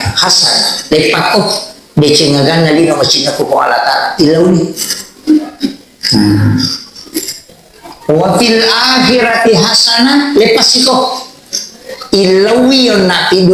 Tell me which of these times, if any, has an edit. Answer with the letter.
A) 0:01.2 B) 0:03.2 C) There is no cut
C